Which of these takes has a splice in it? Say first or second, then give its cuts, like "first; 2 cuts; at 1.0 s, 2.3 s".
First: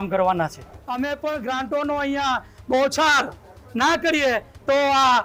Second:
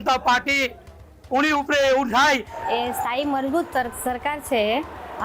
second; 1 cut; at 2.5 s